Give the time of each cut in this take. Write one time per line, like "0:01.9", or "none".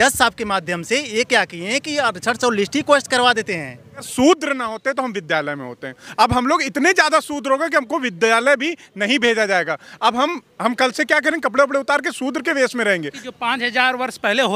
0:04.1
0:13.2